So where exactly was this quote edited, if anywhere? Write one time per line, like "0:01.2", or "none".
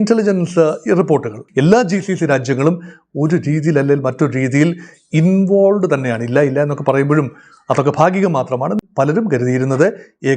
0:01.4
0:08.8